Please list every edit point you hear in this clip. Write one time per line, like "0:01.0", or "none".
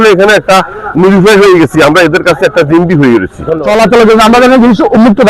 0:03.5